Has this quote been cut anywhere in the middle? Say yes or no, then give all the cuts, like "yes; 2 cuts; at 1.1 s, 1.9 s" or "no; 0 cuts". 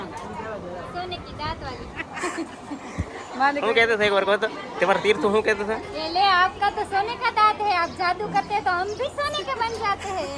no; 0 cuts